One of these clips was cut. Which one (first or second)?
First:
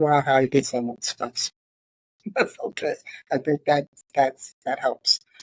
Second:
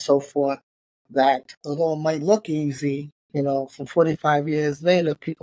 second